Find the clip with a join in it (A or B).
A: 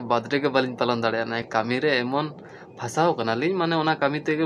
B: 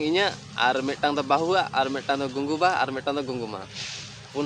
A